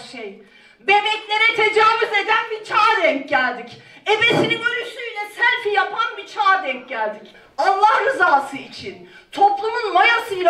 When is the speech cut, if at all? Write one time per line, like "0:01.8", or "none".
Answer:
0:07.4